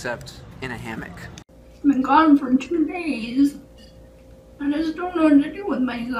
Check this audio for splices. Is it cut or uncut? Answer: cut